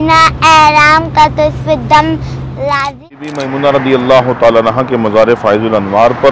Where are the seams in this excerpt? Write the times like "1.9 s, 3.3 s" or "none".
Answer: 3.2 s

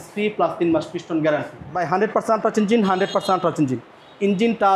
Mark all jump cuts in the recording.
1.8 s

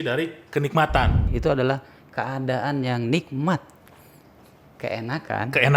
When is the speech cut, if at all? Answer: 1.3 s

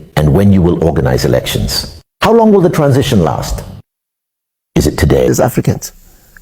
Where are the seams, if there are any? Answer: 5.3 s

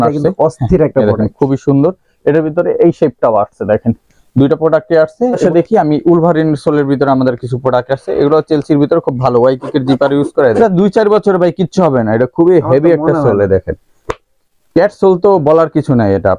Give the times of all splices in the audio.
5.4 s, 10.6 s

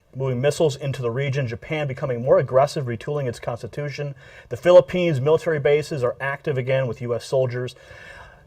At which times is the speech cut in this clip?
4.8 s

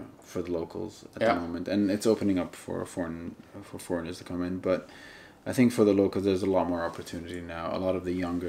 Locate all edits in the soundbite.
none

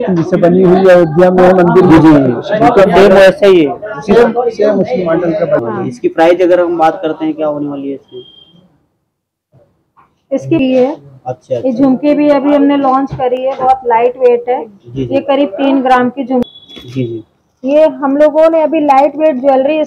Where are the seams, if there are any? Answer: 5.6 s, 10.6 s, 16.5 s

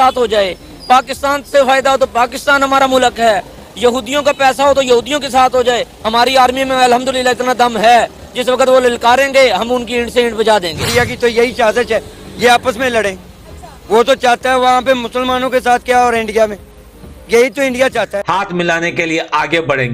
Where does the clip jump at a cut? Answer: 18.2 s

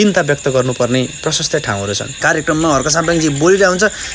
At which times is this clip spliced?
2.1 s

